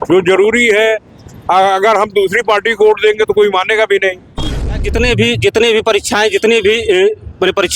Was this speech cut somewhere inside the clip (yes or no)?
yes